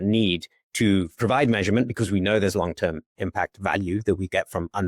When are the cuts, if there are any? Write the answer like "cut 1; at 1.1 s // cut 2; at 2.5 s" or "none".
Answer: none